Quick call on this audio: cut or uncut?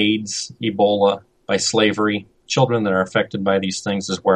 cut